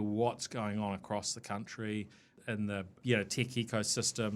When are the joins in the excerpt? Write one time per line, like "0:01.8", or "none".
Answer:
0:02.6